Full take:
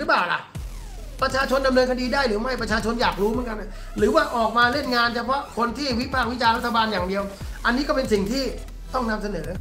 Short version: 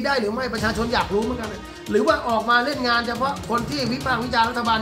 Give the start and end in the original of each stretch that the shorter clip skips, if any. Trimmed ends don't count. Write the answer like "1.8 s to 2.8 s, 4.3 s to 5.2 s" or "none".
none